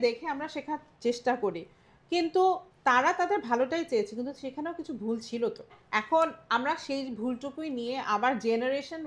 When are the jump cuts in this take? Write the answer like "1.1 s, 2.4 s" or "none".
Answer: 2.7 s, 5.8 s

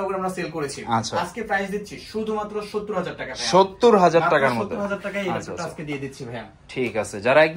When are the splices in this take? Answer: none

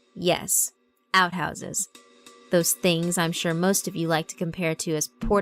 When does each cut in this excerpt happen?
none

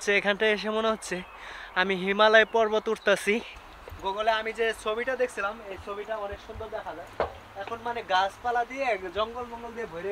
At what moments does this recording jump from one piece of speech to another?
3.6 s

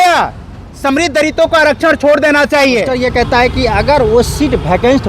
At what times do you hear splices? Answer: 2.9 s

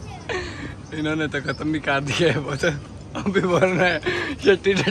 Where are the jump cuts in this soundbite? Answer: none

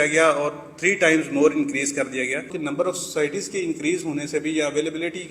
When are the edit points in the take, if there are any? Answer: 2.5 s

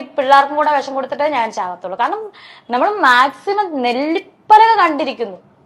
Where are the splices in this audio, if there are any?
none

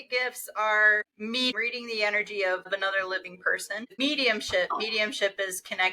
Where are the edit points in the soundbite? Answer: 1.5 s, 2.7 s, 4.0 s

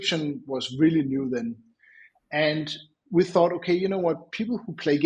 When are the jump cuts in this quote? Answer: none

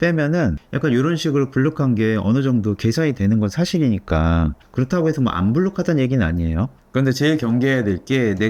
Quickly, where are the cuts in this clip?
none

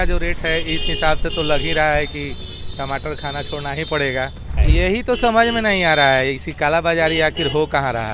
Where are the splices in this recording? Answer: 4.5 s

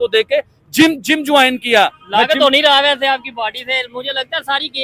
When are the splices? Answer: none

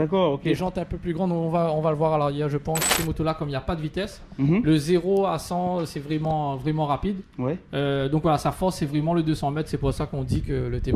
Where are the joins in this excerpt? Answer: 2.9 s

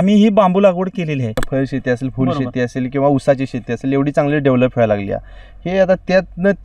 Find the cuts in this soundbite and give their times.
1.4 s

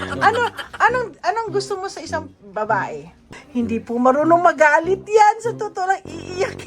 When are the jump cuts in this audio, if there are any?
3.3 s

